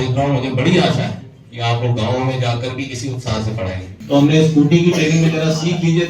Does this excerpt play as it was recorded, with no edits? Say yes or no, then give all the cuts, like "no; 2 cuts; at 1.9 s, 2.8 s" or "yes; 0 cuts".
no; 1 cut; at 3.9 s